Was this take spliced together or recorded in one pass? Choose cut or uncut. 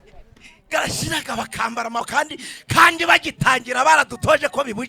cut